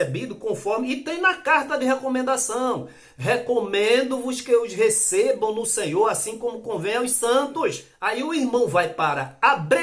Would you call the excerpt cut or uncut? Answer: cut